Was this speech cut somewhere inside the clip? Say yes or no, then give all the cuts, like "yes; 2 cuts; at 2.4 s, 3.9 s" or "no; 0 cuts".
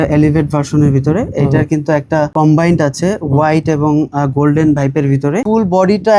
yes; 2 cuts; at 2.3 s, 5.4 s